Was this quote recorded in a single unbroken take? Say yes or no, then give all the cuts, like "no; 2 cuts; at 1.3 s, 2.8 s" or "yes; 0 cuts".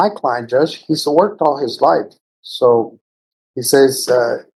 yes; 0 cuts